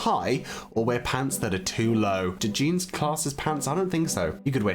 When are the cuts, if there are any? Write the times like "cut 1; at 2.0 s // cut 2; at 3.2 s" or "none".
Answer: cut 1; at 2.5 s